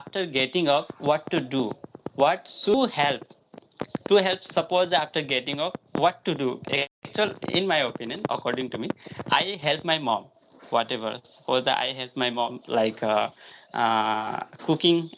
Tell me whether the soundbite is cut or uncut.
cut